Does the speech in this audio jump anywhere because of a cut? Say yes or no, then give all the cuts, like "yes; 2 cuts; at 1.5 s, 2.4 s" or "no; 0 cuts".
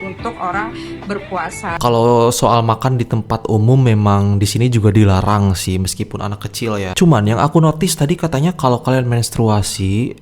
yes; 1 cut; at 1.8 s